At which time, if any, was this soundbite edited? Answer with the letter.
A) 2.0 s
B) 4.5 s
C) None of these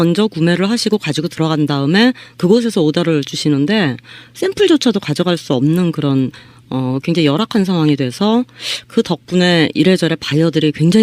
A